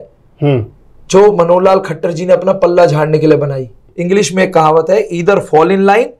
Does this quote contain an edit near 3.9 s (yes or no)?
yes